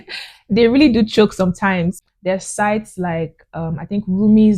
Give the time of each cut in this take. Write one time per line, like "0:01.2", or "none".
none